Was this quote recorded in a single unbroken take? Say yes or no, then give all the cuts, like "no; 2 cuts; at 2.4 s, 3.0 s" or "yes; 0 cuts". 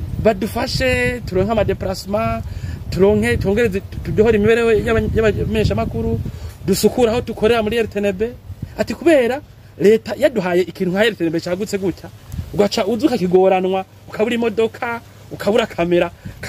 yes; 0 cuts